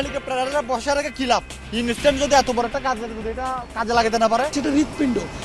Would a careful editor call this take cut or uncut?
cut